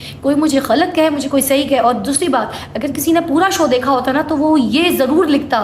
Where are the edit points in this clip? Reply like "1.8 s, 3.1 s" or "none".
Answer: none